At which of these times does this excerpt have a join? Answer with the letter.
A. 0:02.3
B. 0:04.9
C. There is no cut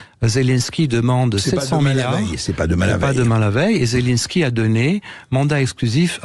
C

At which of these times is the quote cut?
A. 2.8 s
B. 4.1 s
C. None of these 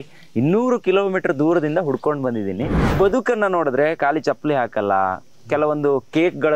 A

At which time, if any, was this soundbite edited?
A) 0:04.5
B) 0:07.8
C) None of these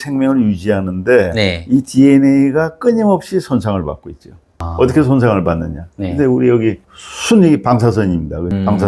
C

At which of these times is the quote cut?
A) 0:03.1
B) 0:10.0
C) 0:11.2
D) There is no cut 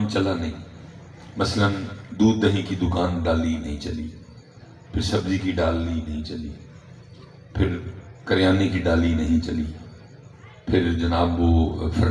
D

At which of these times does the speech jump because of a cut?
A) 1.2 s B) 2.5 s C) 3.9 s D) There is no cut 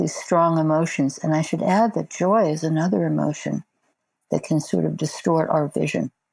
C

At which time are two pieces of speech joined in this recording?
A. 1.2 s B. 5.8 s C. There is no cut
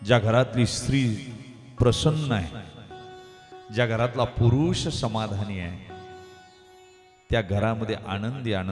C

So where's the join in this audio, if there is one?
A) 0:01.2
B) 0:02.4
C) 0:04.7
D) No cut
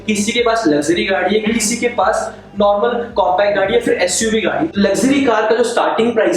C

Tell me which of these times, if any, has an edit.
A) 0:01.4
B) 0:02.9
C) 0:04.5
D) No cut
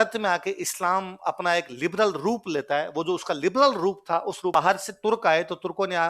C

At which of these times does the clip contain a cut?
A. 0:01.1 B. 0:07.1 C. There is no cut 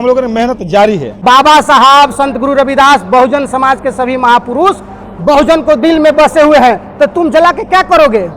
A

